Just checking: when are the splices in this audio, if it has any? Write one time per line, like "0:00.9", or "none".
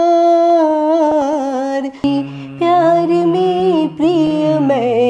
0:02.0